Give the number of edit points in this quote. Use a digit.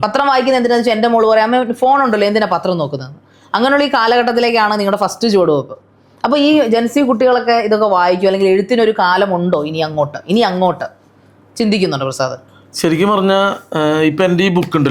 0